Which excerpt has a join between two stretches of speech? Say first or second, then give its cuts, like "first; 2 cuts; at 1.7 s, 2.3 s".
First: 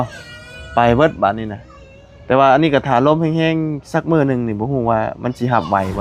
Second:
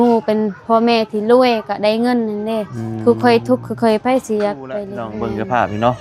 second; 1 cut; at 5.0 s